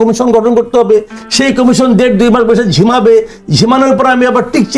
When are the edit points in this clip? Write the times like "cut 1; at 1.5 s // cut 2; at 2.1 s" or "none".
none